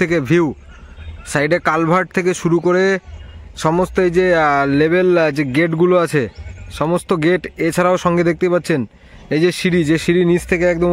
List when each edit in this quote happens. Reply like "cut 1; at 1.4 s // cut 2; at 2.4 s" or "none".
none